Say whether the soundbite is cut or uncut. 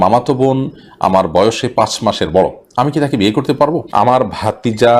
cut